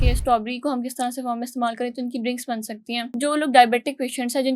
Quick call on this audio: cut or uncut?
cut